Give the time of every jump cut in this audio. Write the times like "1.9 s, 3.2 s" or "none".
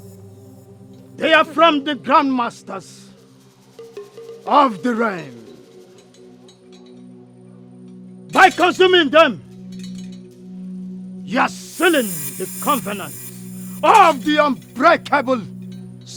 none